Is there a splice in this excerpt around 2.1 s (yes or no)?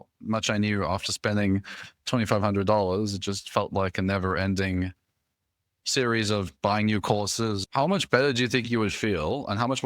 no